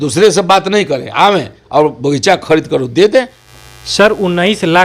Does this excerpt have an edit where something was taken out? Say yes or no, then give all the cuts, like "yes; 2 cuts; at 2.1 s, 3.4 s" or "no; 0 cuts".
yes; 1 cut; at 3.4 s